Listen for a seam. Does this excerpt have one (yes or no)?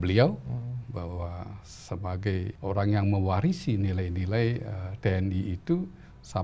yes